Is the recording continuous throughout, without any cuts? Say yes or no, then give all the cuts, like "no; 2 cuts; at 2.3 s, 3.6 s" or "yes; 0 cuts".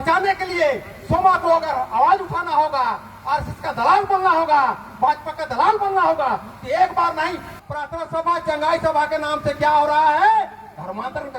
no; 1 cut; at 7.5 s